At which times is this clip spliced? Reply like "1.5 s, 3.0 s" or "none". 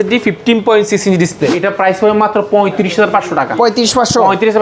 1.5 s